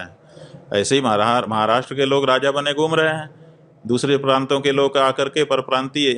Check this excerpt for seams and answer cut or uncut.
uncut